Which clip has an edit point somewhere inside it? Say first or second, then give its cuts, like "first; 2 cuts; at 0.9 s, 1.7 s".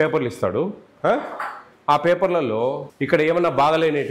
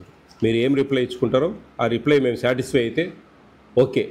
first; 1 cut; at 2.9 s